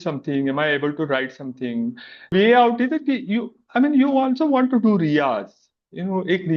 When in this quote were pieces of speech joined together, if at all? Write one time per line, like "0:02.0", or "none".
0:02.3